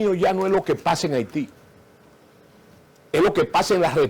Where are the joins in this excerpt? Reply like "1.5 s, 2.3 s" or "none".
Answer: none